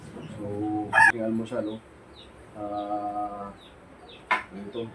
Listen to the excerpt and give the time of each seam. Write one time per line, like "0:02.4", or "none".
0:01.1